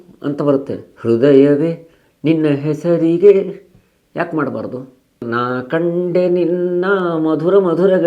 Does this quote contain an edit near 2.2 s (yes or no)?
no